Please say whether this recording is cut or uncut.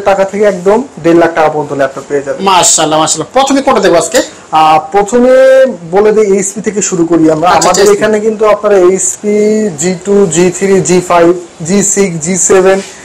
uncut